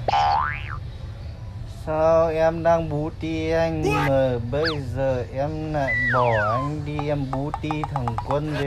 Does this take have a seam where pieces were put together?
no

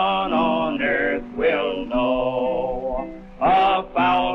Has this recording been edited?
yes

